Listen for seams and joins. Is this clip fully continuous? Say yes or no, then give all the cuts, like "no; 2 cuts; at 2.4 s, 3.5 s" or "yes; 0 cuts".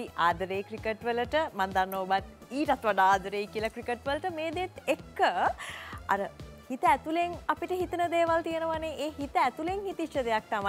yes; 0 cuts